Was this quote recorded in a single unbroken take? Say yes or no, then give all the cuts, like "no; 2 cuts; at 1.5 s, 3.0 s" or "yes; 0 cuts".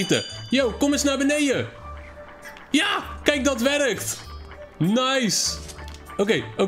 yes; 0 cuts